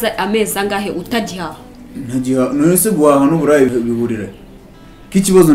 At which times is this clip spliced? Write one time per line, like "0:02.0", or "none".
0:03.7